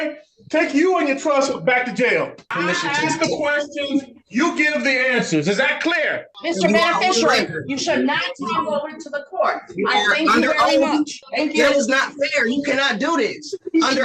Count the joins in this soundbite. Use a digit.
3